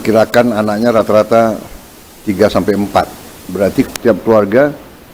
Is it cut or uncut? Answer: uncut